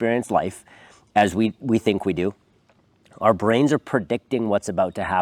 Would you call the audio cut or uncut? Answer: uncut